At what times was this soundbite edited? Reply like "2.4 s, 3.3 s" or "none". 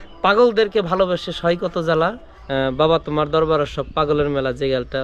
2.3 s